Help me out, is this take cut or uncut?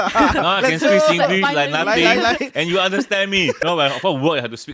cut